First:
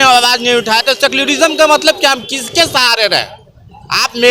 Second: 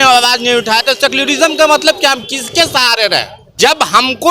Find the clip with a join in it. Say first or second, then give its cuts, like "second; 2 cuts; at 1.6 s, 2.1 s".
second; 1 cut; at 3.4 s